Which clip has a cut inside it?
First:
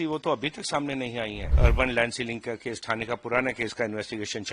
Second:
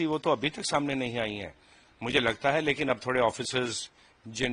first; 1 cut; at 1.5 s

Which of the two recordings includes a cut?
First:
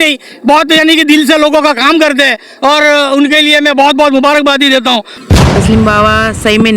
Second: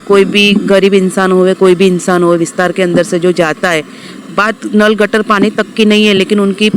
first; 1 cut; at 5.1 s

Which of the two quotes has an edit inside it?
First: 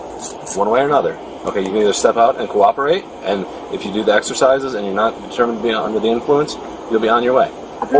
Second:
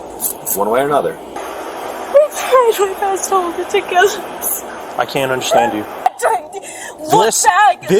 second; 2 cuts; at 1.4 s, 6.1 s

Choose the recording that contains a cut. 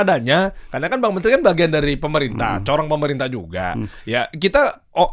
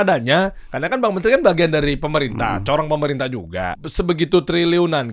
second; 1 cut; at 3.8 s

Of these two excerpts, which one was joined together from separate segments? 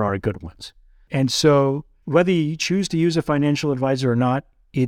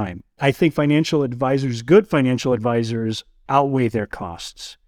first; 1 cut; at 2.0 s

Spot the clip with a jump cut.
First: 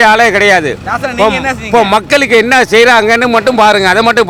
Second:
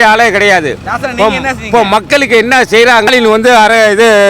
second; 1 cut; at 3.1 s

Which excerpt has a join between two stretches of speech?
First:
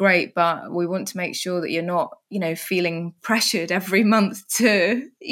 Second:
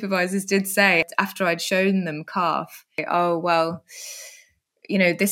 second; 2 cuts; at 1.0 s, 3.0 s

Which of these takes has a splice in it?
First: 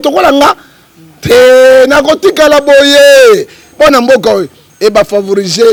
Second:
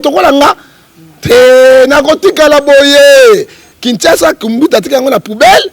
second; 1 cut; at 3.6 s

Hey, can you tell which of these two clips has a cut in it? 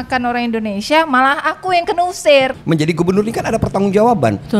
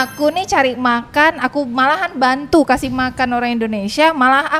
first; 1 cut; at 2.6 s

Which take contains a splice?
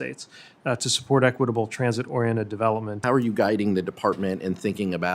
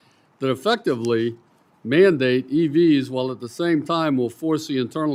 first; 1 cut; at 2.9 s

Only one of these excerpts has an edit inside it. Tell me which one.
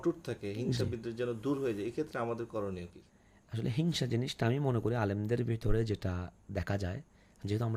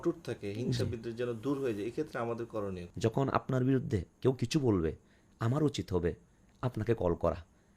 second; 1 cut; at 2.8 s

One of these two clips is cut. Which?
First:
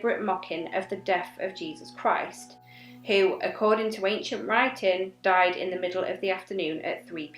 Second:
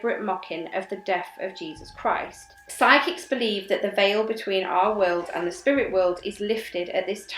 second; 1 cut; at 2.6 s

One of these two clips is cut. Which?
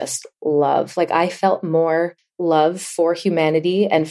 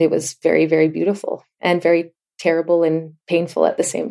first; 1 cut; at 2.2 s

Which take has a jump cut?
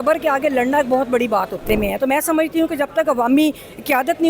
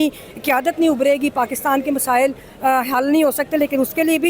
first; 1 cut; at 1.6 s

